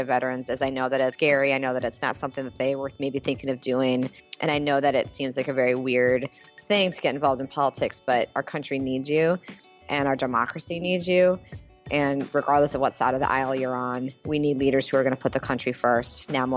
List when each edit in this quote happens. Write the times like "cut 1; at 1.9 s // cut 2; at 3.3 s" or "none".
cut 1; at 1.2 s // cut 2; at 4.2 s